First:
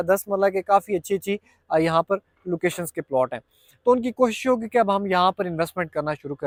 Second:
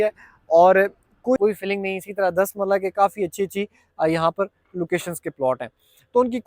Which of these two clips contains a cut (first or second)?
second